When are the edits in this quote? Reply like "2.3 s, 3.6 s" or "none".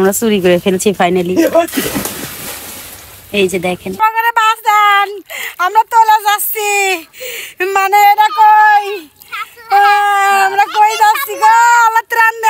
4.0 s